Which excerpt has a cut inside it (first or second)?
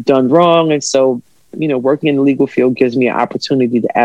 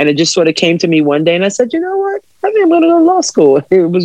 second